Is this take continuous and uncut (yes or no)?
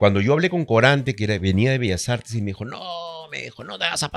yes